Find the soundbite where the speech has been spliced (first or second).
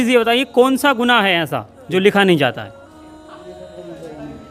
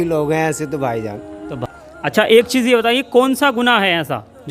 second